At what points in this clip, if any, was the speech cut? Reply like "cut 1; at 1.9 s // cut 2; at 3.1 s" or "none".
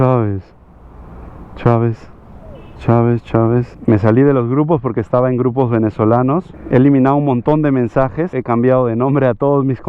cut 1; at 3.7 s // cut 2; at 6.5 s // cut 3; at 8.3 s